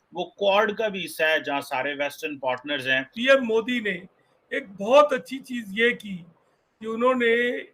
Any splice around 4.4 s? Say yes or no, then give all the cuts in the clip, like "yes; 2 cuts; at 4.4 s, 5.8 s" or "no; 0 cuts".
no; 1 cut; at 3.1 s